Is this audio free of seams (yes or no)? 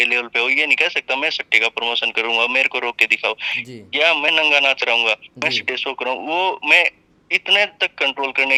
yes